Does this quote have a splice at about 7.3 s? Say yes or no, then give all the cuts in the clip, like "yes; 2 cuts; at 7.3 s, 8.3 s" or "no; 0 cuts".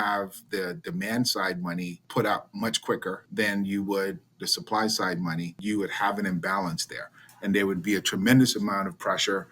no; 3 cuts; at 2.0 s, 3.2 s, 5.6 s